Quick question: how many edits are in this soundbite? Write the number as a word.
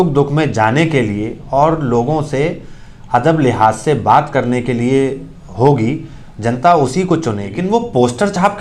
one